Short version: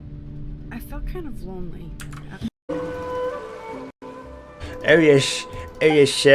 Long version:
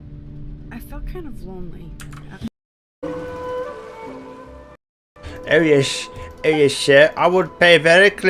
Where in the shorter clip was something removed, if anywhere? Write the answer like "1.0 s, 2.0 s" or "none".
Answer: 2.6 s, 4.0 s